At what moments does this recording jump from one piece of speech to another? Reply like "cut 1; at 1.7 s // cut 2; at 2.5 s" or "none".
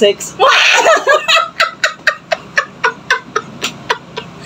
none